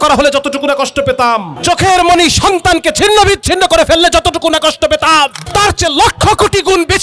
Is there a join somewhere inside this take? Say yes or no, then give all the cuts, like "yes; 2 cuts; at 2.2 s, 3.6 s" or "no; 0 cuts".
yes; 2 cuts; at 1.5 s, 5.4 s